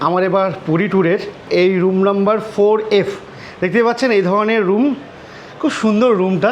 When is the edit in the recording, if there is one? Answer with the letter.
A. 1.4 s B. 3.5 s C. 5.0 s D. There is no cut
A